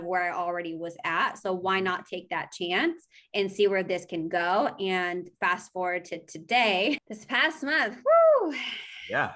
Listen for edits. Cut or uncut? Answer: cut